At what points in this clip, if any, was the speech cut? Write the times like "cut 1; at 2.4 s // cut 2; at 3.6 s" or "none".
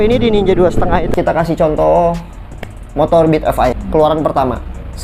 cut 1; at 1.1 s // cut 2; at 3.8 s